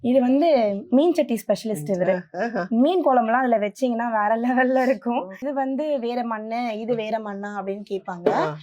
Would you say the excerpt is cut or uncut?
cut